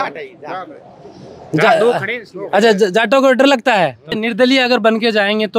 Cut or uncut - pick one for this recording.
cut